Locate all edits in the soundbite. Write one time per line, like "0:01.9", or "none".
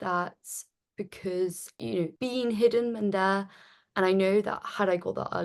0:01.7

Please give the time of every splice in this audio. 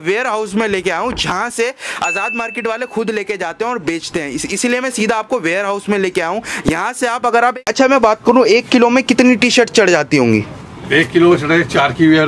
0:07.7

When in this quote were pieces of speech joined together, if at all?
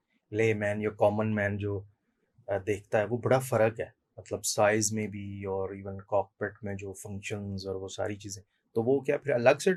none

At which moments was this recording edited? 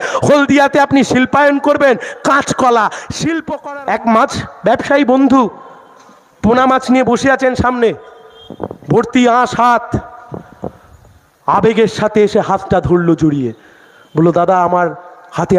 0:03.4

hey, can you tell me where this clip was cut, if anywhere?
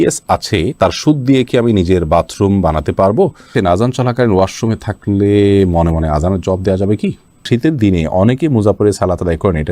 0:03.4
0:07.4

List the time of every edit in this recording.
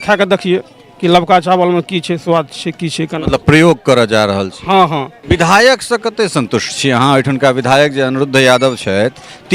0:05.2

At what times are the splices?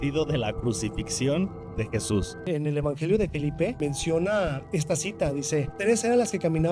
0:02.5
0:03.8
0:04.6
0:05.7

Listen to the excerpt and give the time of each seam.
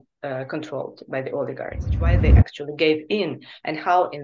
0:02.2

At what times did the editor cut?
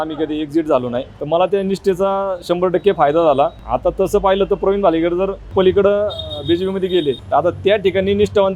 0:01.1
0:03.6
0:05.5
0:07.2

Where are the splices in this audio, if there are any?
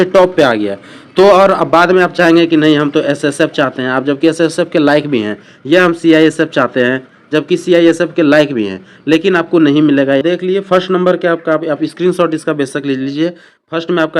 0:10.2

